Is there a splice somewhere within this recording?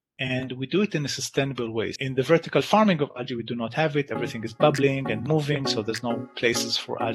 yes; 1 cut; at 2.0 s

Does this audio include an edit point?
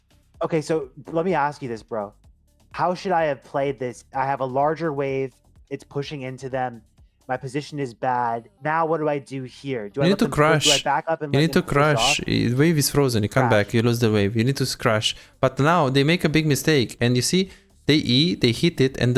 yes; 1 cut; at 8.5 s

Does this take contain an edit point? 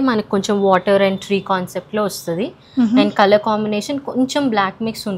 no; 0 cuts

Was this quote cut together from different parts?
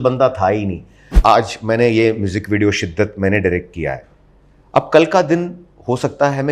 yes; 1 cut; at 1.1 s

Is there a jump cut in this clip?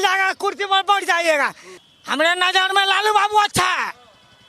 no; 0 cuts

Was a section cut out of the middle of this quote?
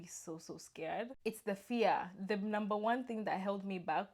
yes; 1 cut; at 1.1 s

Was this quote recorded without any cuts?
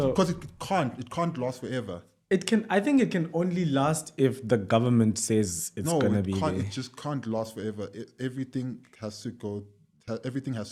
yes; 0 cuts

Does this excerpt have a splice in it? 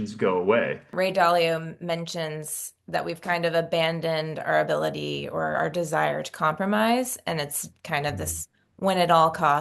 yes; 1 cut; at 0.9 s

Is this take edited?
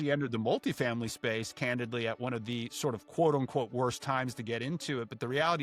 no; 0 cuts

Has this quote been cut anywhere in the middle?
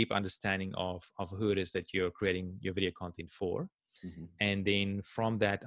no; 0 cuts

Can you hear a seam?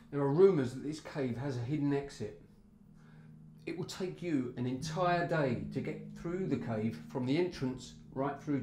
no; 0 cuts

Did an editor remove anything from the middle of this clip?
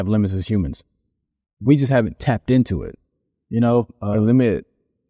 no; 0 cuts

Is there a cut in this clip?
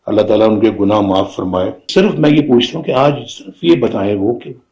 yes; 1 cut; at 1.9 s

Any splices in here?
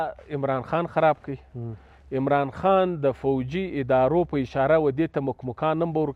no; 0 cuts

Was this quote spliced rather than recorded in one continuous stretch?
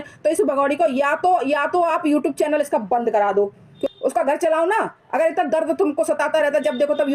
yes; 1 cut; at 3.7 s

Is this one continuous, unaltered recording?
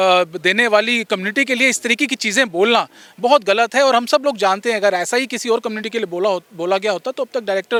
yes; 0 cuts

